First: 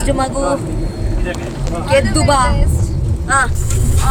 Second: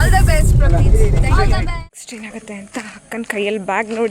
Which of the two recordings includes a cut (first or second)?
second